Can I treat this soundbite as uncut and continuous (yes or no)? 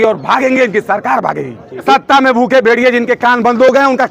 no